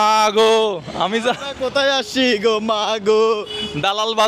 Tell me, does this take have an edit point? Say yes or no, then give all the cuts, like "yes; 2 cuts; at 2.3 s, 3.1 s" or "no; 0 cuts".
no; 0 cuts